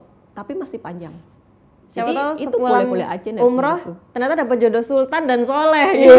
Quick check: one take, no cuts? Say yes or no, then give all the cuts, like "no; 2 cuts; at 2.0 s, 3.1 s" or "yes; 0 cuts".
no; 1 cut; at 1.7 s